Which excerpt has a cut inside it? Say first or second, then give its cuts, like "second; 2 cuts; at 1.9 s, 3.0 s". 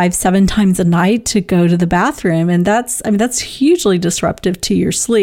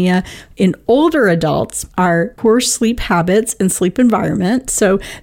second; 1 cut; at 2.1 s